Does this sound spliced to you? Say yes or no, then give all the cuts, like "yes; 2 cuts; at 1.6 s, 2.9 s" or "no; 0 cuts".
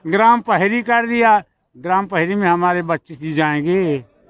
no; 0 cuts